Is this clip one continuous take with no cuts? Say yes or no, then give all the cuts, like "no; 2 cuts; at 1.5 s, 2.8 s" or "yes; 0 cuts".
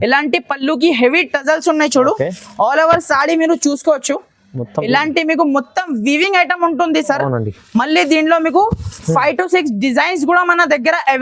yes; 0 cuts